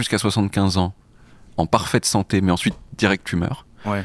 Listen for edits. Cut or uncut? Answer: uncut